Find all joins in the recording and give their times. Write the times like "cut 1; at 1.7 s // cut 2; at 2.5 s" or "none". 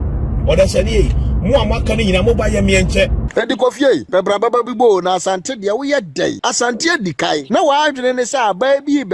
cut 1; at 3.2 s // cut 2; at 4.1 s // cut 3; at 6.4 s // cut 4; at 7.4 s